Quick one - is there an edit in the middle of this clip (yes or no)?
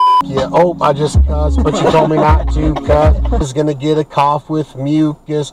yes